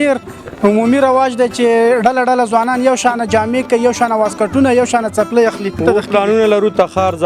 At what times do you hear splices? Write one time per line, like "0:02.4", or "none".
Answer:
0:05.8